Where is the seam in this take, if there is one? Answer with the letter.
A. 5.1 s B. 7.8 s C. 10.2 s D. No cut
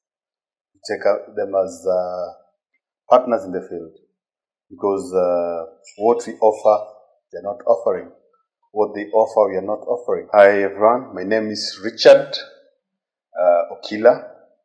C